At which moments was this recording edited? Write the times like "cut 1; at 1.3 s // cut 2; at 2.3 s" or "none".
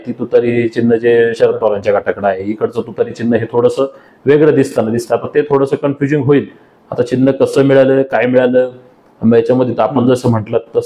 none